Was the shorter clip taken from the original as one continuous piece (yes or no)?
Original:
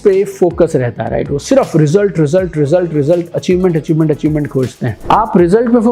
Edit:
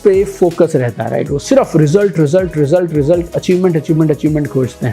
yes